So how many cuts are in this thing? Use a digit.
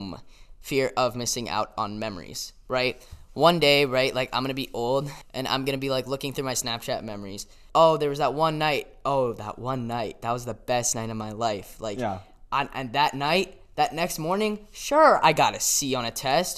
2